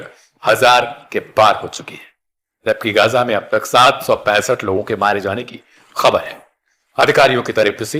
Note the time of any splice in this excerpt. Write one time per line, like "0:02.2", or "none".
none